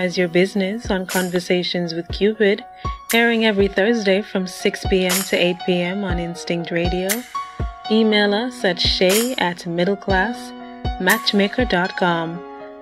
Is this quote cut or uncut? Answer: uncut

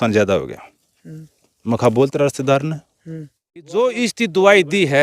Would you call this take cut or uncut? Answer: cut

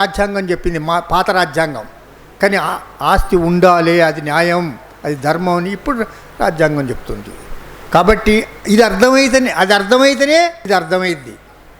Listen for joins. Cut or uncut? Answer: cut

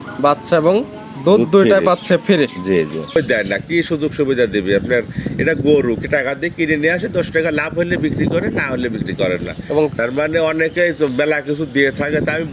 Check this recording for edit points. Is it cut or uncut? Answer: cut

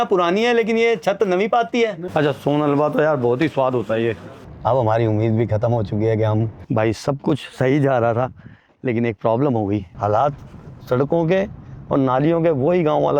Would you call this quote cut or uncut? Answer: cut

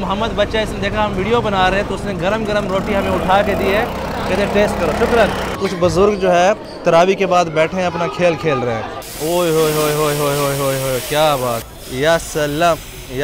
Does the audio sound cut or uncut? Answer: cut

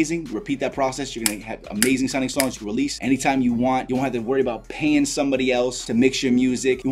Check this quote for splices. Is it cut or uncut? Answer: uncut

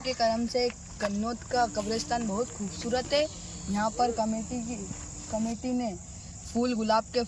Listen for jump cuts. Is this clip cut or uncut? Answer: uncut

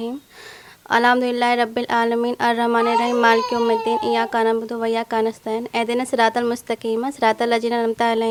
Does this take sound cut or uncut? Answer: uncut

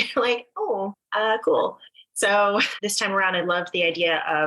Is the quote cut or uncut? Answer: cut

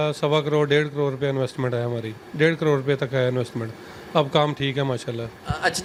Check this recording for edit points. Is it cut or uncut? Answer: uncut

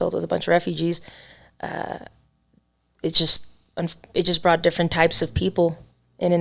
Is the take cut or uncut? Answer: uncut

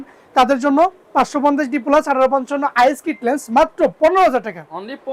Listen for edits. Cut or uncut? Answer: uncut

